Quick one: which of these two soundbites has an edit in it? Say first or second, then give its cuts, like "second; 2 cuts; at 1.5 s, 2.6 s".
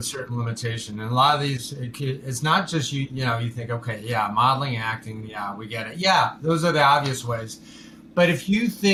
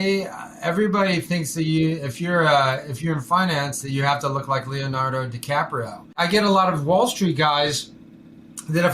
second; 1 cut; at 6.2 s